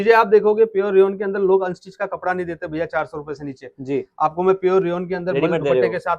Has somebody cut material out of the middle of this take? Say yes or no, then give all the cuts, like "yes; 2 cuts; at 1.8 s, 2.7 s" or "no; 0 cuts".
no; 0 cuts